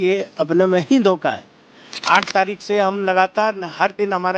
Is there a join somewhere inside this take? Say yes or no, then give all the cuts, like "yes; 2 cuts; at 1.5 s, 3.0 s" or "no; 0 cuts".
yes; 1 cut; at 1.8 s